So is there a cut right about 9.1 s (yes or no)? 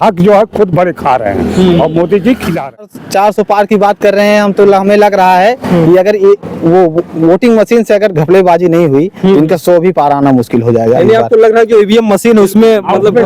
no